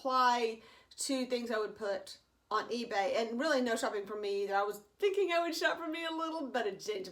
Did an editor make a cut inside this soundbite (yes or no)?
no